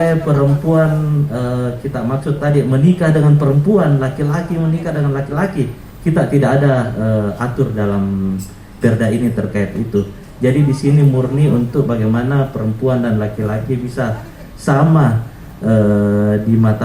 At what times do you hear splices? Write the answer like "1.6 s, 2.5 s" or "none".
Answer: none